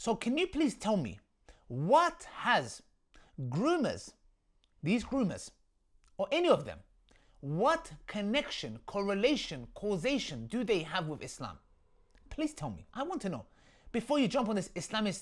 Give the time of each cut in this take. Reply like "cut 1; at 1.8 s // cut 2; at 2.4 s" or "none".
none

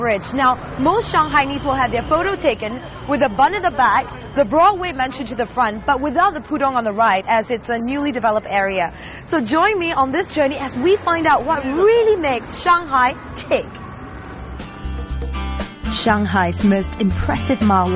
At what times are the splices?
cut 1; at 13.4 s

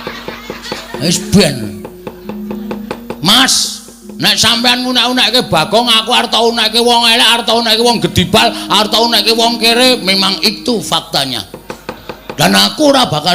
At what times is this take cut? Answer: cut 1; at 12.1 s

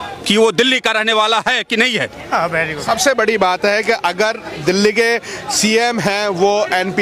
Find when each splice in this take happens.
none

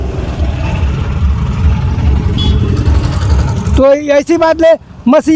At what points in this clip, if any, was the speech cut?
none

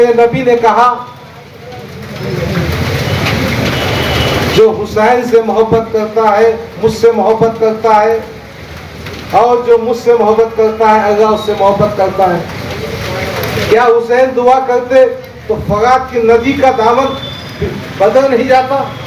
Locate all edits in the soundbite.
none

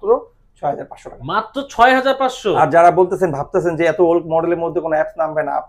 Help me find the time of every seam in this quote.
none

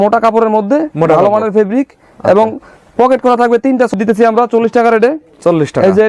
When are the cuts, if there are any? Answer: cut 1; at 3.9 s

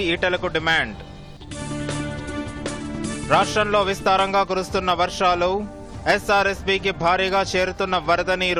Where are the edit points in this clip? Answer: none

